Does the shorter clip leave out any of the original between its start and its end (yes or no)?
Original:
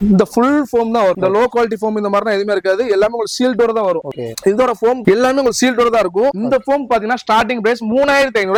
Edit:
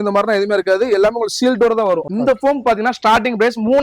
yes